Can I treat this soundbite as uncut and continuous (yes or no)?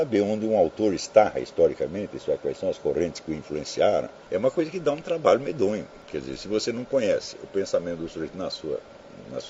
no